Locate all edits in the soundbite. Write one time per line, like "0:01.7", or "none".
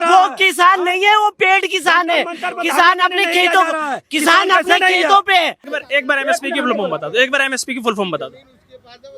0:05.8